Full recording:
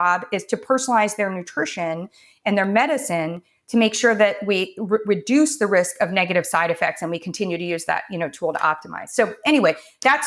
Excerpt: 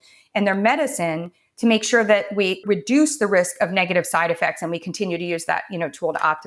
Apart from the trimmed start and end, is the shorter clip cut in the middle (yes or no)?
yes